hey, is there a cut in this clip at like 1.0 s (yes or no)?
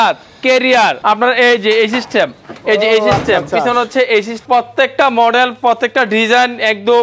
yes